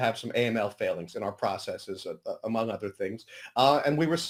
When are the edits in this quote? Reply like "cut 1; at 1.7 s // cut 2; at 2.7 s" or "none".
none